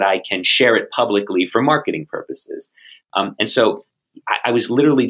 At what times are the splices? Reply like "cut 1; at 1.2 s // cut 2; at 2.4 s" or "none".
none